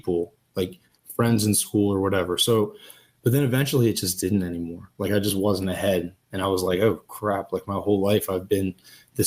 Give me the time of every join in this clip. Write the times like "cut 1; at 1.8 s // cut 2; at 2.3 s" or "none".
none